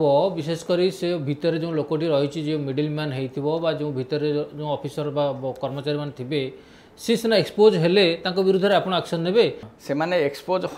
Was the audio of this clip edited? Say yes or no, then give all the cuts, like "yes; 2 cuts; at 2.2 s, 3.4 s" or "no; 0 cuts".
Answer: yes; 1 cut; at 9.7 s